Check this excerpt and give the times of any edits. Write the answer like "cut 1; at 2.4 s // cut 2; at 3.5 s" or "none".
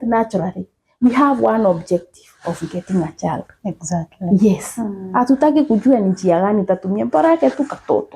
none